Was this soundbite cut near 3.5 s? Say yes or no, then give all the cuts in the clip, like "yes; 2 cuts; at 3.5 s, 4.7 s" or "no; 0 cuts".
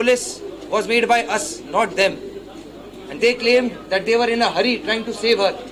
no; 0 cuts